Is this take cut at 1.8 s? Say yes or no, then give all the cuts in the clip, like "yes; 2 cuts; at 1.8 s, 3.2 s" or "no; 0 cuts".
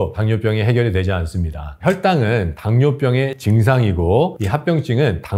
no; 0 cuts